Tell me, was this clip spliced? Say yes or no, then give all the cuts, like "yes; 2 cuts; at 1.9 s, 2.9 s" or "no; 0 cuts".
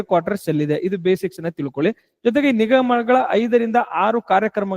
no; 0 cuts